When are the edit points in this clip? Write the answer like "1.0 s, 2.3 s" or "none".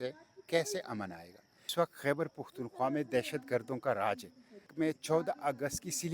1.7 s, 4.7 s

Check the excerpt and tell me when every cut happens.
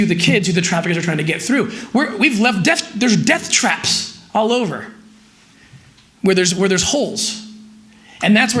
none

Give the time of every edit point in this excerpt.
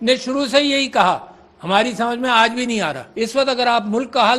3.0 s

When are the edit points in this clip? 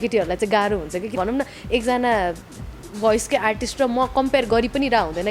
1.2 s

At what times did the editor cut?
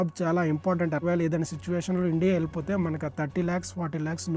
1.0 s

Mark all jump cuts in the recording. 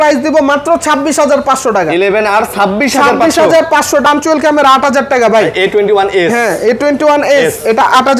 4.1 s

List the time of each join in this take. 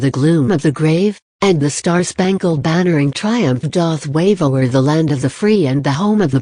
1.3 s, 4.1 s

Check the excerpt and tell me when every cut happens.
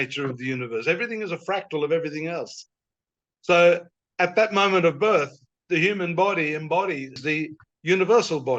7.2 s

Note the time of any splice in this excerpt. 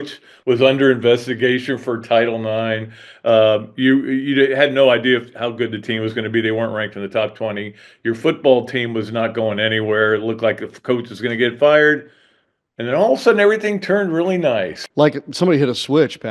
14.8 s

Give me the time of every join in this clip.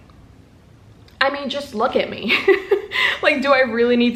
none

